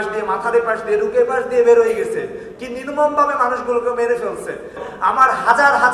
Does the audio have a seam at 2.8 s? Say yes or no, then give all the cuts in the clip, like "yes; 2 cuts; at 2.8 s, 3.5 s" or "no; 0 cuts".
no; 1 cut; at 4.8 s